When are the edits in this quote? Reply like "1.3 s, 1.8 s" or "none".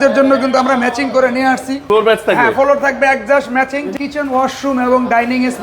1.8 s, 3.9 s